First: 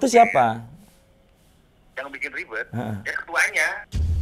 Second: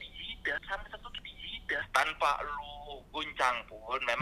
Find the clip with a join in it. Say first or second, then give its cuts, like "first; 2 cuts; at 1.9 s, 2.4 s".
second; 1 cut; at 1.9 s